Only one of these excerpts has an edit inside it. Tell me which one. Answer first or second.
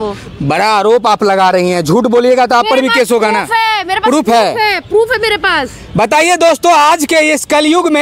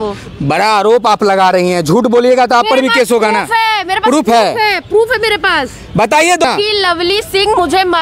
second